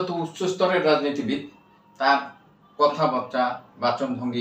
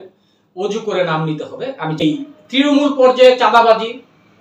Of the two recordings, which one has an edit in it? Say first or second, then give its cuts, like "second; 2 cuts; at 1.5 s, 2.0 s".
second; 1 cut; at 2.0 s